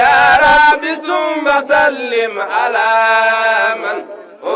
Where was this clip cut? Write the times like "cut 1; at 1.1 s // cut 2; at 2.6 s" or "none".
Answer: cut 1; at 3.7 s